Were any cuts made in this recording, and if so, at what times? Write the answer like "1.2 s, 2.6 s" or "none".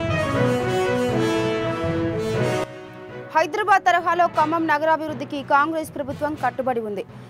2.7 s